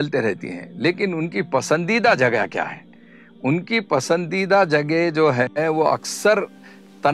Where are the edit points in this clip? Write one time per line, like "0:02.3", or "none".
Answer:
none

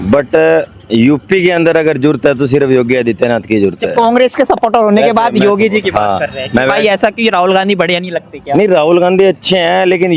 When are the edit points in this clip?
none

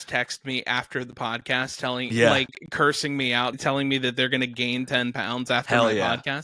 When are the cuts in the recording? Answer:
0:03.6

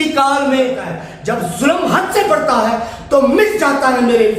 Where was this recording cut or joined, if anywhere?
0:01.1

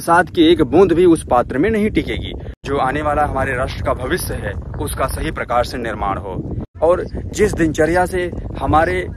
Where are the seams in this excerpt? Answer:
0:02.5
0:06.6

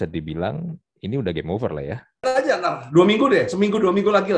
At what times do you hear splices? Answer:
0:02.2

